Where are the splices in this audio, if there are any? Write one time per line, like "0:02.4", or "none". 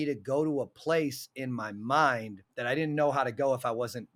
none